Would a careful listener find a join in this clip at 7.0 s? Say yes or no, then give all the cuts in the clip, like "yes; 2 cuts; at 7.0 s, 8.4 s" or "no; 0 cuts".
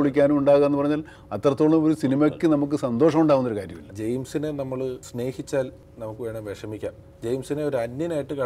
yes; 4 cuts; at 3.9 s, 5.1 s, 5.8 s, 7.0 s